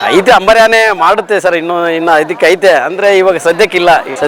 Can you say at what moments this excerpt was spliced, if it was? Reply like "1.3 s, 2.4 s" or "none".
none